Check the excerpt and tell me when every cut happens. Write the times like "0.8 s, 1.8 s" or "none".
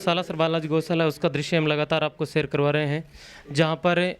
none